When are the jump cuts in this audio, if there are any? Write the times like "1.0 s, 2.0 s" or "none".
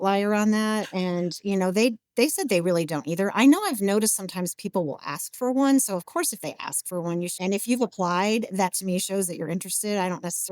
7.4 s